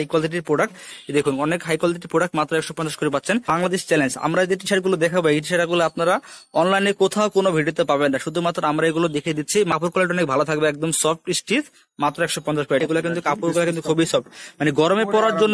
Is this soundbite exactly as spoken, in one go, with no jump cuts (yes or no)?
no